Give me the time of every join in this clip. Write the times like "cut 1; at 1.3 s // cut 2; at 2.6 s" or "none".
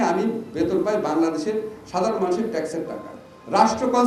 none